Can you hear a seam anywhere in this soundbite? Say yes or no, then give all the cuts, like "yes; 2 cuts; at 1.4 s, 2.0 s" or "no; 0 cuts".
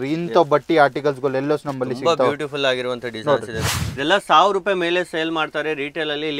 yes; 1 cut; at 3.7 s